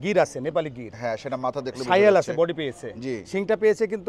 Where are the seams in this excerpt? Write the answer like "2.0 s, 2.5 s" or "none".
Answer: none